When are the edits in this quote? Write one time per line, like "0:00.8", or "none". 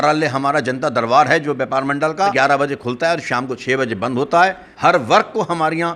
0:02.3
0:04.7